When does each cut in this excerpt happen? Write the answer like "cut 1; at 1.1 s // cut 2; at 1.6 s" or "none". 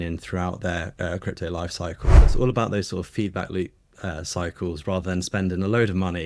cut 1; at 2.2 s